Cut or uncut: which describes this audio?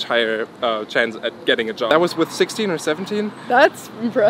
cut